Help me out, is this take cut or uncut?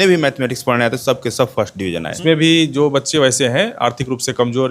cut